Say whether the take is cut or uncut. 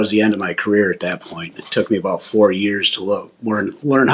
uncut